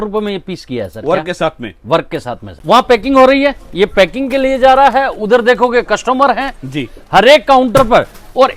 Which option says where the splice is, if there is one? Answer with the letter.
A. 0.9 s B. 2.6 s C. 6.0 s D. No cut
B